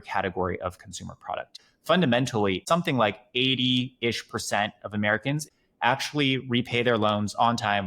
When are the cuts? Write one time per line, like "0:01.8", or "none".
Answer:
0:01.5
0:02.6
0:05.5